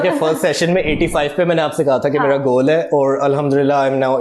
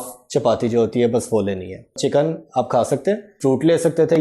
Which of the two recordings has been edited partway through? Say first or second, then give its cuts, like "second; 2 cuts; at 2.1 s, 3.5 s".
second; 2 cuts; at 2.0 s, 3.3 s